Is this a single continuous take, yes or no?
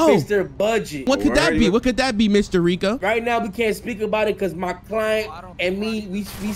no